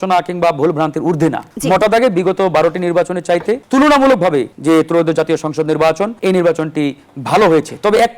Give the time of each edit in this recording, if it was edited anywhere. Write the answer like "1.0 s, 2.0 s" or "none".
1.5 s, 3.6 s, 4.5 s, 6.1 s